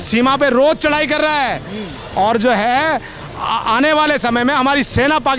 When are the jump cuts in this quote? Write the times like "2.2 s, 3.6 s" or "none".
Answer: none